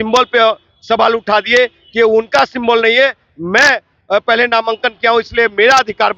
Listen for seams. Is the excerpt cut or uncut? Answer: uncut